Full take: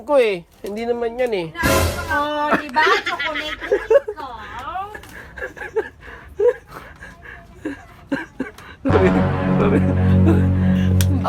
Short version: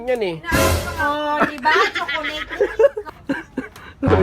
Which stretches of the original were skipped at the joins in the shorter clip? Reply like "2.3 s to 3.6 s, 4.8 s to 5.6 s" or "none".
4.2 s to 7.9 s